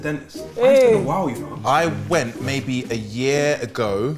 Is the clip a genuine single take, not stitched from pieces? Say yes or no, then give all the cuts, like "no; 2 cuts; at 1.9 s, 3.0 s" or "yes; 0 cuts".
yes; 0 cuts